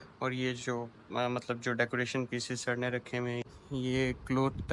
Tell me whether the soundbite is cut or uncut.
cut